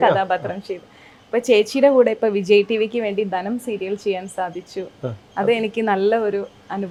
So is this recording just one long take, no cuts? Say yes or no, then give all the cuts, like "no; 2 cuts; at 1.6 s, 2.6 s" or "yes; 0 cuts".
yes; 0 cuts